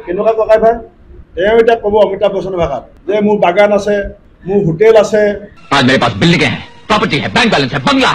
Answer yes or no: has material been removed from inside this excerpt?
no